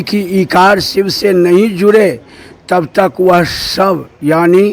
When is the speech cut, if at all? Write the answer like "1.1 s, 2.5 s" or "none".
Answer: none